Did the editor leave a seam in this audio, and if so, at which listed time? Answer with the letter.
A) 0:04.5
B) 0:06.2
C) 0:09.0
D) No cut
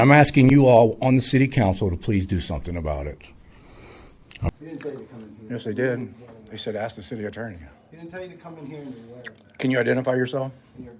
A